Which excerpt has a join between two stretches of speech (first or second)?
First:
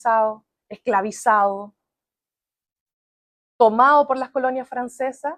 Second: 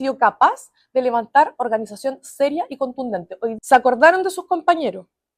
second